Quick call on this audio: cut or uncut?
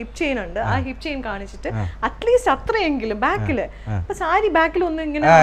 uncut